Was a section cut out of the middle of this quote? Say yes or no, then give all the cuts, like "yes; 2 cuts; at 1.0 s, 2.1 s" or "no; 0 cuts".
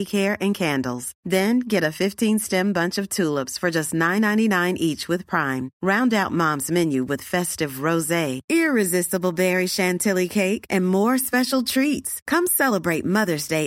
no; 0 cuts